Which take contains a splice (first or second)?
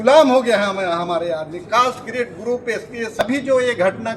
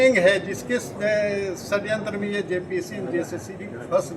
first